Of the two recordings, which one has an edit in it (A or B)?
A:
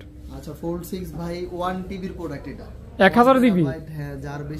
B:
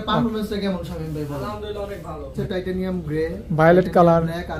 B